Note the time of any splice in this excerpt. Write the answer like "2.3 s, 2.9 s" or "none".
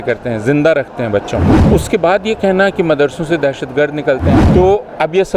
1.6 s, 4.4 s